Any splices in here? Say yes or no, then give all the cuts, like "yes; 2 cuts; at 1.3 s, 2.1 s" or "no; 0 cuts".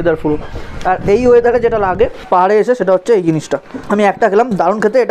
yes; 2 cuts; at 2.2 s, 3.8 s